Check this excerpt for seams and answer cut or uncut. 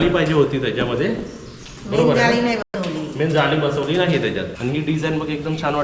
cut